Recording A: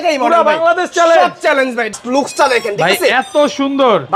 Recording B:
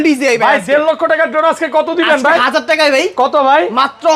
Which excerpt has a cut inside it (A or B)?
A